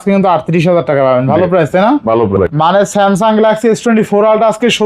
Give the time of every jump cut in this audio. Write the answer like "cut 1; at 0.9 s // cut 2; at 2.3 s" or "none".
cut 1; at 2.3 s